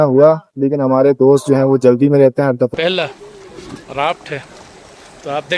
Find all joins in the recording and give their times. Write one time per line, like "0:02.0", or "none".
0:02.7